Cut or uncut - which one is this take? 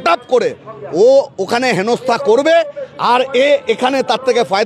uncut